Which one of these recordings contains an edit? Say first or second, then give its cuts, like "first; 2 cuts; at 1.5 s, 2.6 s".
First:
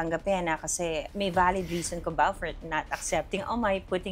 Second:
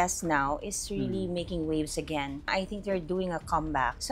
second; 1 cut; at 2.5 s